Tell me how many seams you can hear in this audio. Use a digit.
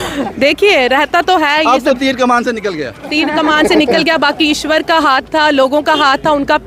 0